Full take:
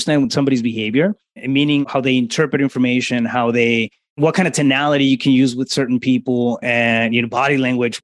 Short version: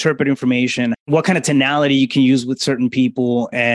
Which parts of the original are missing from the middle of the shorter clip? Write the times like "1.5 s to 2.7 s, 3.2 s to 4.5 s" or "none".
3.3 s to 4.1 s